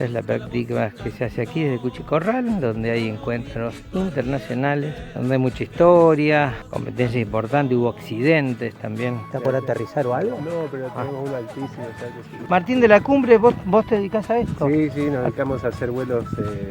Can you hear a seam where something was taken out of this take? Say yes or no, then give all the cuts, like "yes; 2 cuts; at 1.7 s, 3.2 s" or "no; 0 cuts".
yes; 3 cuts; at 5.0 s, 9.3 s, 12.4 s